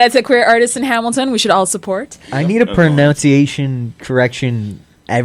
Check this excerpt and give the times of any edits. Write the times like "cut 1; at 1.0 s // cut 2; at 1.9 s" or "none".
none

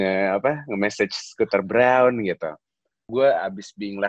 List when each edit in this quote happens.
cut 1; at 3.0 s

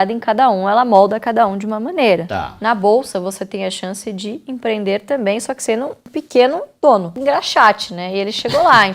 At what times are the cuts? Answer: cut 1; at 2.3 s // cut 2; at 7.2 s

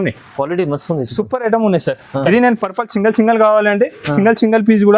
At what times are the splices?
cut 1; at 2.3 s

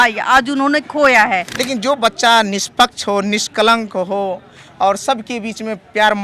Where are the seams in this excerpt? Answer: cut 1; at 1.5 s

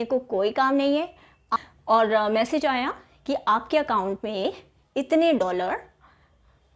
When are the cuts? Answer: cut 1; at 1.4 s

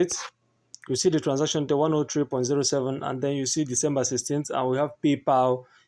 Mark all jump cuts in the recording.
none

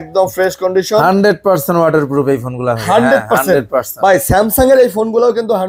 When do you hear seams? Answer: none

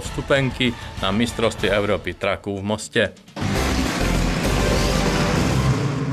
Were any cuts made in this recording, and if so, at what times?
cut 1; at 3.2 s

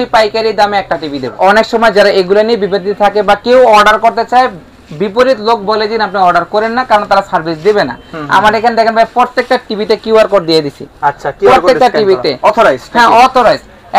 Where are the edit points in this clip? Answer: cut 1; at 1.4 s

